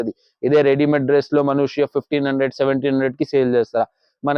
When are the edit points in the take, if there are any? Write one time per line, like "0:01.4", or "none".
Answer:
none